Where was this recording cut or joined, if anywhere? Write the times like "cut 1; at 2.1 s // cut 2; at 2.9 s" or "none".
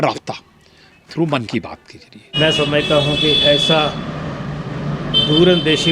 cut 1; at 2.2 s